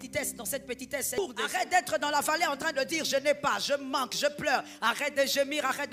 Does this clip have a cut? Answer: yes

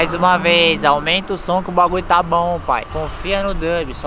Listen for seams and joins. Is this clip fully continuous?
no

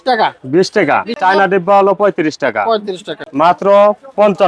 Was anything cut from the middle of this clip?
yes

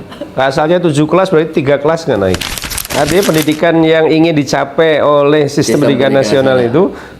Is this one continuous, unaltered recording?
no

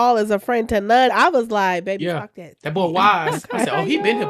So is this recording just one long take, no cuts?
no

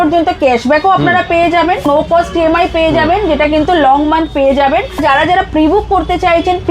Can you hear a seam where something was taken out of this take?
yes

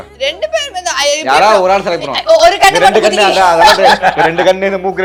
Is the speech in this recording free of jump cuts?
yes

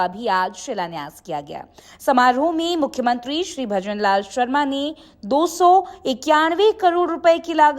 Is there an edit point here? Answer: yes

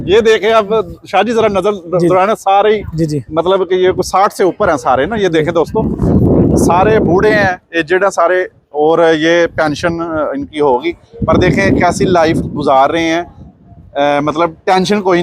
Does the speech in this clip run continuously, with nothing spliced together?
yes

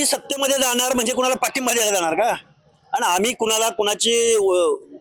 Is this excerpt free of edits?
yes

